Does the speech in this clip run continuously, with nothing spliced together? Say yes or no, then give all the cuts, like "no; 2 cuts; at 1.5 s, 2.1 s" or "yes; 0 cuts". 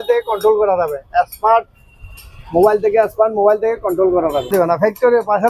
no; 1 cut; at 4.5 s